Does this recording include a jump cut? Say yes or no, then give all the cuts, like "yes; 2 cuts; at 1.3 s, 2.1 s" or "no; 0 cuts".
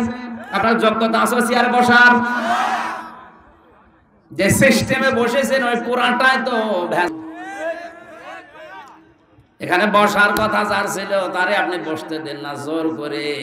no; 0 cuts